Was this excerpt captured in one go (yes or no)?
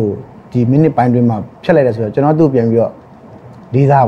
no